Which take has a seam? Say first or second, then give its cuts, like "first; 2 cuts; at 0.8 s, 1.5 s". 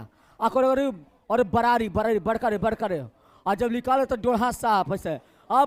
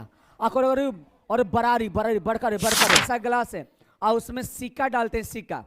second; 1 cut; at 3.0 s